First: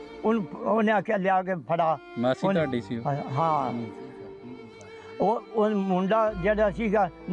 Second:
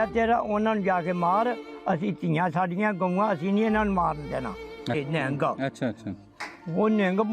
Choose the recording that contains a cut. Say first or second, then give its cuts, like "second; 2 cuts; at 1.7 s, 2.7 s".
second; 1 cut; at 5.0 s